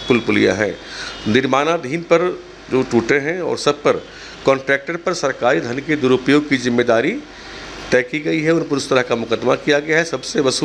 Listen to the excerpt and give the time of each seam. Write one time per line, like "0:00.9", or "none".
none